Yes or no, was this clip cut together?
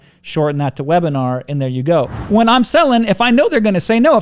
yes